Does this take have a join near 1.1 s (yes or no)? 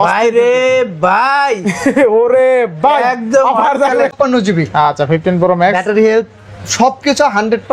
no